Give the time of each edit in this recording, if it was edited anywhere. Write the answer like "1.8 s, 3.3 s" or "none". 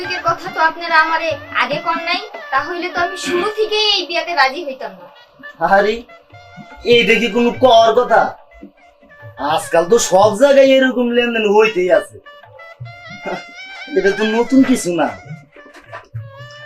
none